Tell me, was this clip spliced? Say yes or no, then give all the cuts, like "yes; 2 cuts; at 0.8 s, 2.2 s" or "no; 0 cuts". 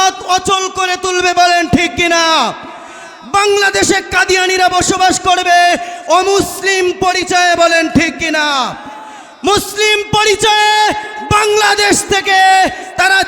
yes; 1 cut; at 3.1 s